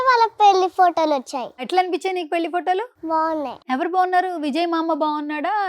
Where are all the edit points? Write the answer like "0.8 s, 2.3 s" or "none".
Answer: 1.6 s, 3.2 s